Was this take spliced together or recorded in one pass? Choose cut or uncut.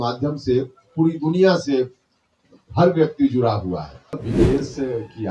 cut